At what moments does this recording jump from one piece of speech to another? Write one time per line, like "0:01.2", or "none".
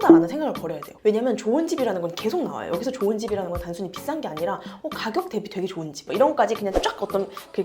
0:06.1

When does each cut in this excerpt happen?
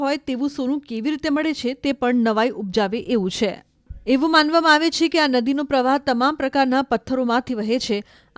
none

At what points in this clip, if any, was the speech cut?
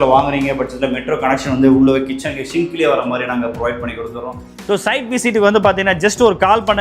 0:04.5

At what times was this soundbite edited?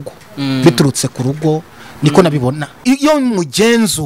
0:02.8

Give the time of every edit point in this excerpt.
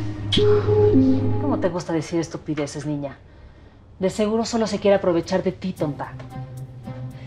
0:01.4

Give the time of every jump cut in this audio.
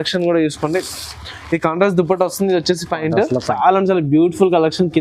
0:03.6

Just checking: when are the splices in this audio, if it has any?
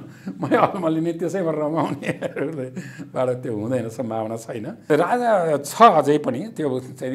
0:04.8

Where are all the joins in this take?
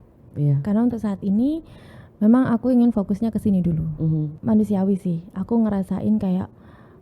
0:04.3

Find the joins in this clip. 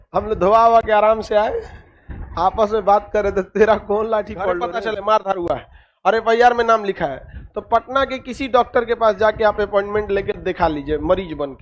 0:04.6

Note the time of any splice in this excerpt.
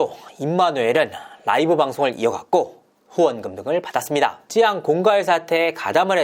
none

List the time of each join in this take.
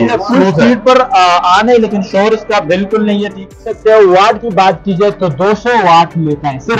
0:03.6

